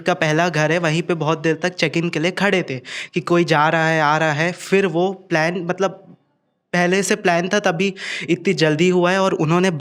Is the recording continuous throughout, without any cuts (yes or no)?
yes